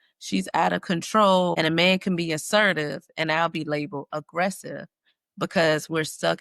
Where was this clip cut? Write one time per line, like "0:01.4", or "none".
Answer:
0:01.6